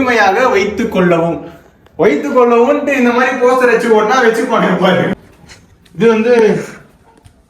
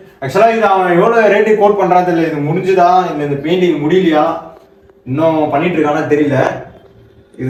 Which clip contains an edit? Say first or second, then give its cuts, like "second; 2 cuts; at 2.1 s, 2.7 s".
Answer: first; 1 cut; at 5.2 s